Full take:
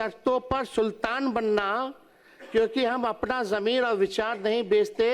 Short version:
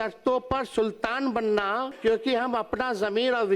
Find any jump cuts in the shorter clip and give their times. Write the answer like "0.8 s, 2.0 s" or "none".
1.9 s